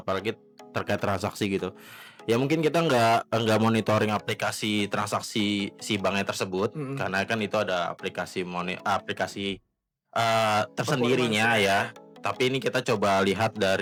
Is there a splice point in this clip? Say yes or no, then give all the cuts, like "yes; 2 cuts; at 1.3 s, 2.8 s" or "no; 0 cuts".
no; 0 cuts